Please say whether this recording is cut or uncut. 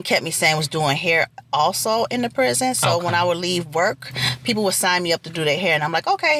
uncut